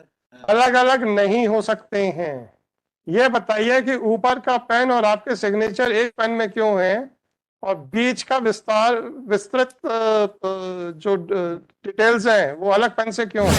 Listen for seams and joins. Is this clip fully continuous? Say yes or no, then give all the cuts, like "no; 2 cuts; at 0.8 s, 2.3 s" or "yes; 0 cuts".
yes; 0 cuts